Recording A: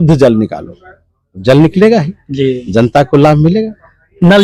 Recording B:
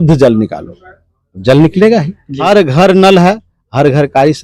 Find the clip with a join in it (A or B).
B